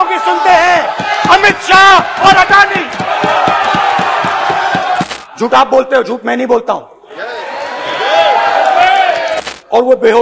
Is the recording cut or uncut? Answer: cut